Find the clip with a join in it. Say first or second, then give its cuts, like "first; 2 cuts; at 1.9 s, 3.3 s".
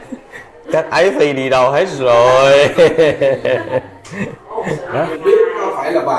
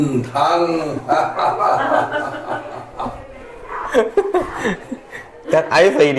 first; 1 cut; at 4.8 s